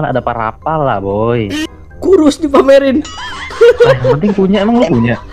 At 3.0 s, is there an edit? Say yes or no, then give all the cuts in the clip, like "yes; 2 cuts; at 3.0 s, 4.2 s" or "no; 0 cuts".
no; 1 cut; at 1.6 s